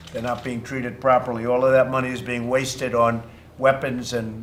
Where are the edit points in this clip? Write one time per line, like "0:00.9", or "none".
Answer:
none